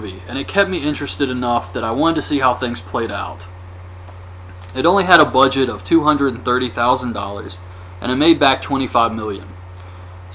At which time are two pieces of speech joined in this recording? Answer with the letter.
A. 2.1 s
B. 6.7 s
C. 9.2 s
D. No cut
B